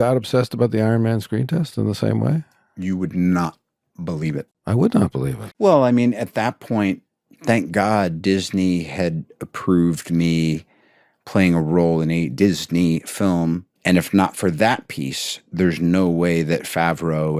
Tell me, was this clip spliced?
yes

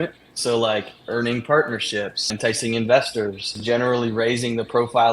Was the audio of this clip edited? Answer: yes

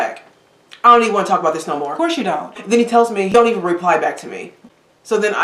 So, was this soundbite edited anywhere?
yes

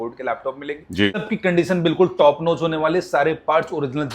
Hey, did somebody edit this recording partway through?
yes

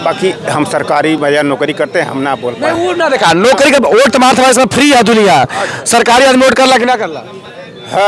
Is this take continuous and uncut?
yes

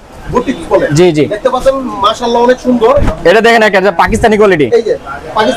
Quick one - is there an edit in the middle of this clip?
yes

